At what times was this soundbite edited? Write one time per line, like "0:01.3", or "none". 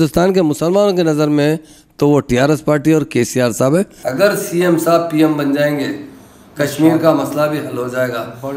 0:04.0